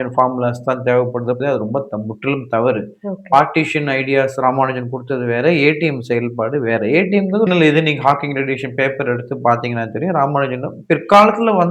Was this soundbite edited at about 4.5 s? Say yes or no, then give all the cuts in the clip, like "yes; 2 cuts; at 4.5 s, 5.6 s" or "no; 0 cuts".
no; 2 cuts; at 1.4 s, 7.5 s